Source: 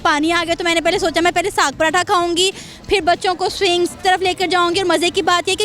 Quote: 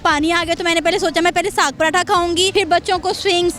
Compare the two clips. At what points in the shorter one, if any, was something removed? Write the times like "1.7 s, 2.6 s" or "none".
2.5 s